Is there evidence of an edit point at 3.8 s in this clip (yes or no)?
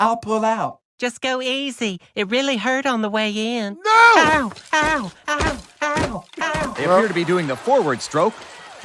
no